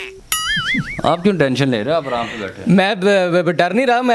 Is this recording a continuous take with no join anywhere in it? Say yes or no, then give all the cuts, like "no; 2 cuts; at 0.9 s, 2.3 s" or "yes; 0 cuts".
yes; 0 cuts